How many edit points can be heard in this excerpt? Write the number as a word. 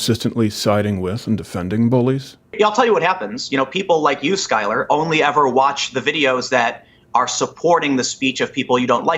one